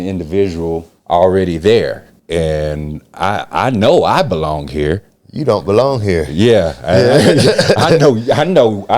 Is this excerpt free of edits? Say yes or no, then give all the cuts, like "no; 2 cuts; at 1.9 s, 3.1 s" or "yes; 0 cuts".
no; 2 cuts; at 0.9 s, 2.1 s